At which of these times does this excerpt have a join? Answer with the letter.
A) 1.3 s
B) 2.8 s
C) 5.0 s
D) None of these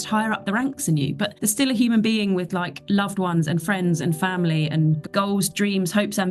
A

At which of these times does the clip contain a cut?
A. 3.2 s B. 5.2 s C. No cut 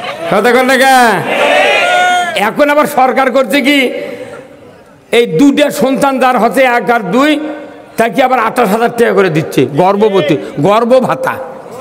C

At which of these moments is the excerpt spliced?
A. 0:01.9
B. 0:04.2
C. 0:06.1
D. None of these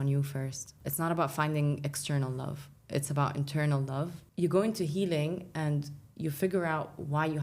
B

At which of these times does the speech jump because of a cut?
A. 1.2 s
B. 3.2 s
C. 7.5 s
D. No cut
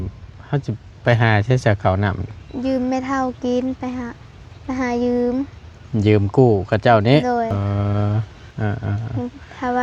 C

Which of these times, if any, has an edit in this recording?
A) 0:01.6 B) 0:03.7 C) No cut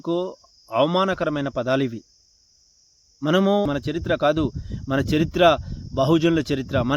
B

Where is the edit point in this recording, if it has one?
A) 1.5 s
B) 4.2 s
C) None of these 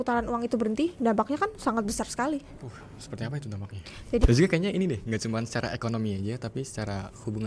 B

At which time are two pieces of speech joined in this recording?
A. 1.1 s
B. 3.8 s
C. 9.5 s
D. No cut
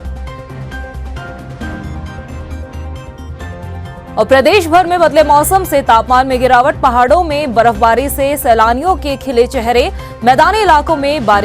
A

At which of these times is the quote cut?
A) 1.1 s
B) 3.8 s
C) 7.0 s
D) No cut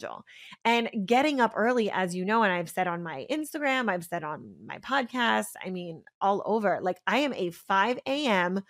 B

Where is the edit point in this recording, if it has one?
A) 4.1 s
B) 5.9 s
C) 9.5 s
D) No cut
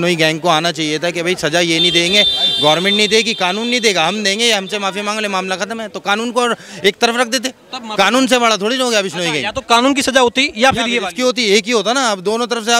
D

